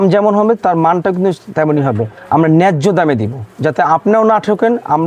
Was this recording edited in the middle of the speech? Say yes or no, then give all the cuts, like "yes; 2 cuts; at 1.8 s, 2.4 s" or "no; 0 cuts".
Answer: no; 0 cuts